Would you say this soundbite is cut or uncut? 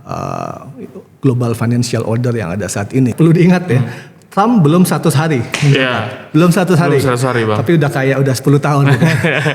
cut